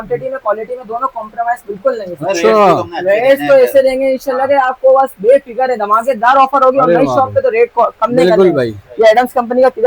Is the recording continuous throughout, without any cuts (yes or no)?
yes